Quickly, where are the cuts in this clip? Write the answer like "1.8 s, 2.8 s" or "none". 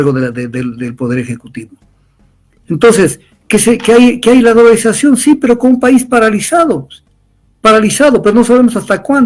none

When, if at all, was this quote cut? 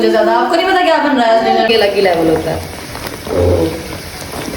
1.7 s

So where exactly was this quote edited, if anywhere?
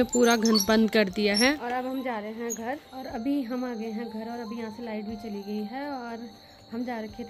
none

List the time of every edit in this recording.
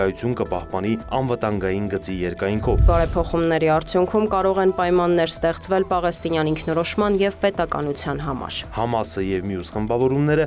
2.8 s, 8.6 s

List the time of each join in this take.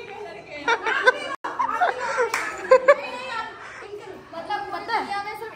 none

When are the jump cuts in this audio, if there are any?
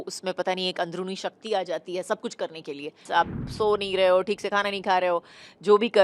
3.0 s

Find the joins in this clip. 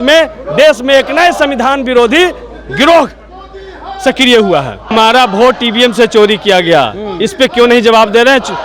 4.9 s

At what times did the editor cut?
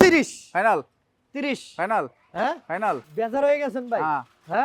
3.1 s

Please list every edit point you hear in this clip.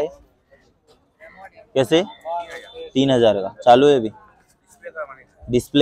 none

